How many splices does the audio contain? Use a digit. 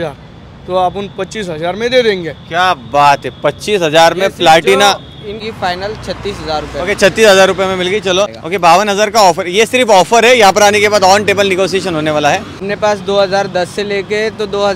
3